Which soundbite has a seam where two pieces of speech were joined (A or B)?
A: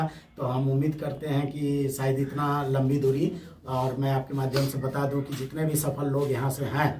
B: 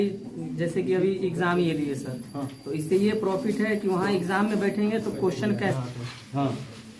B